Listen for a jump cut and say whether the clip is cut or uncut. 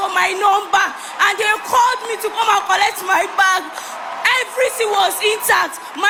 uncut